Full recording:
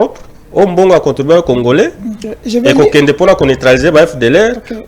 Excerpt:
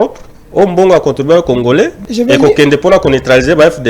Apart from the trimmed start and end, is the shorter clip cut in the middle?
yes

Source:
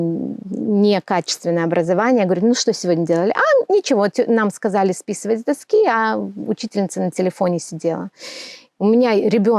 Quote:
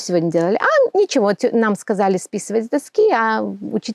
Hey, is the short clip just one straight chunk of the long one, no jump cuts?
yes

